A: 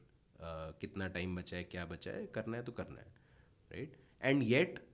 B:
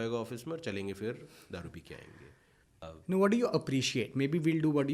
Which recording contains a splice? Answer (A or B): B